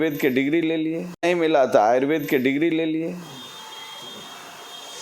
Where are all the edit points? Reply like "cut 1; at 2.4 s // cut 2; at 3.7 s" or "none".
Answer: none